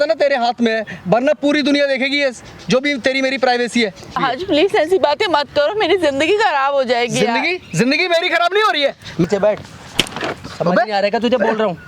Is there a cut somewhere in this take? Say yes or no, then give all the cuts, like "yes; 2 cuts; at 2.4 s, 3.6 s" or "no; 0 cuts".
yes; 2 cuts; at 4.2 s, 9.2 s